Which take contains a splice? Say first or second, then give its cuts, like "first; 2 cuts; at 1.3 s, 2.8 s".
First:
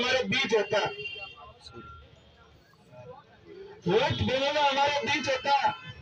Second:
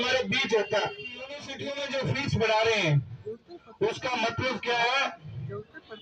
second; 1 cut; at 1.5 s